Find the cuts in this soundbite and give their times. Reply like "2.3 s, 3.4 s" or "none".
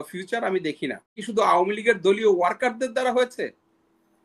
1.2 s